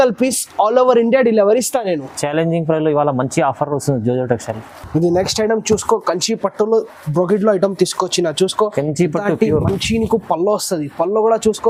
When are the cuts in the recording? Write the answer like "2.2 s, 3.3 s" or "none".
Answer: none